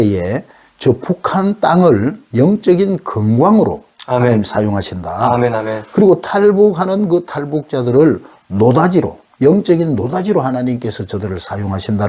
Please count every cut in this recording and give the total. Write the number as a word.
zero